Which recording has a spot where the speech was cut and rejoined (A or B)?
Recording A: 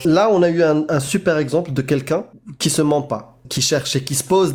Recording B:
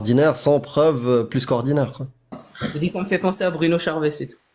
B